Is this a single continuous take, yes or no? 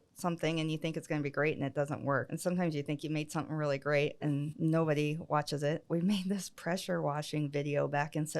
no